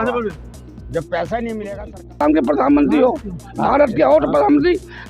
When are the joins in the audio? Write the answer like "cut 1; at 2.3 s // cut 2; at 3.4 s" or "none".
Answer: cut 1; at 2.2 s